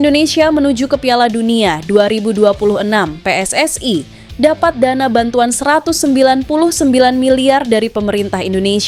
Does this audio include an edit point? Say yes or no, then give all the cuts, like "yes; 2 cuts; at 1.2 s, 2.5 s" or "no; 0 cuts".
no; 0 cuts